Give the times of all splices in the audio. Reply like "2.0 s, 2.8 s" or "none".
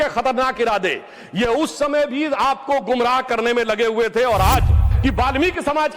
4.8 s